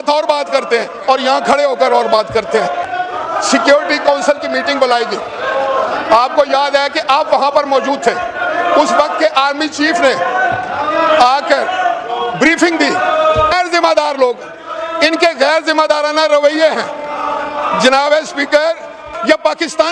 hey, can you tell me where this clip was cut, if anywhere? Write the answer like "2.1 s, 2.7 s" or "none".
none